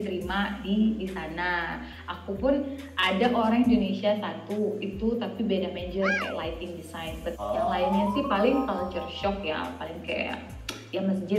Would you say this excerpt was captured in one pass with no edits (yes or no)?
no